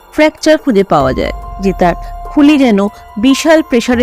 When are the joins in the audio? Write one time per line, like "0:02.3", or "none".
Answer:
0:01.6